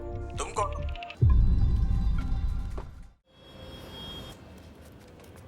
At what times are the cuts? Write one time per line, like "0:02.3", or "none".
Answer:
0:01.0
0:03.3